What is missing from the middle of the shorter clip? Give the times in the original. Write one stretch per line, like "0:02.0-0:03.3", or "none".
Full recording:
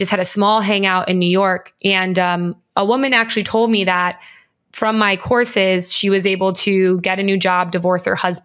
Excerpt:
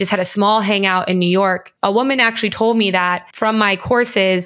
0:01.7-0:02.6
0:04.2-0:04.7